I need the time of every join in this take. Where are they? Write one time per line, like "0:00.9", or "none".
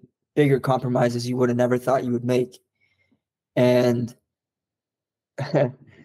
none